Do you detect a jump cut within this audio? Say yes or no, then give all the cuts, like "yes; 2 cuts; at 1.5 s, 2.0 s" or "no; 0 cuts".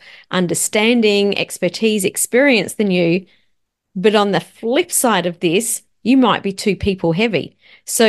no; 0 cuts